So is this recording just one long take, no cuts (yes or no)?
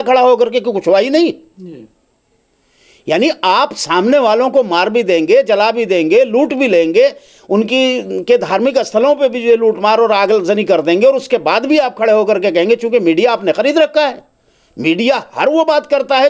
yes